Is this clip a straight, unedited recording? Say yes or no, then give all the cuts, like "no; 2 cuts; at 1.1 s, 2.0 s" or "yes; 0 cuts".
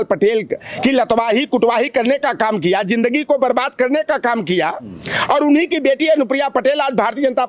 yes; 0 cuts